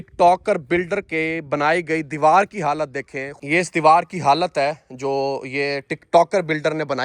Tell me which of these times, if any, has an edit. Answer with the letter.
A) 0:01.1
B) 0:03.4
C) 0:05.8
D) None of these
B